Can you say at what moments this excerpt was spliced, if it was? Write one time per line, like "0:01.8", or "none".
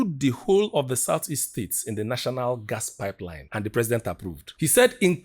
0:03.3